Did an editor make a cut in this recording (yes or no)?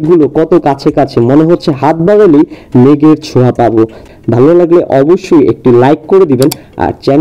yes